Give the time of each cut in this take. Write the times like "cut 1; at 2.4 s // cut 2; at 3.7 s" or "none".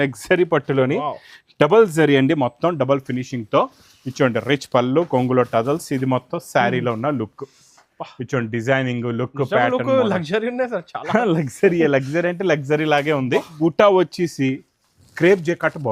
cut 1; at 13.5 s